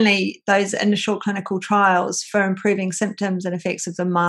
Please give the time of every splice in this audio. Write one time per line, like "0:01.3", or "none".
none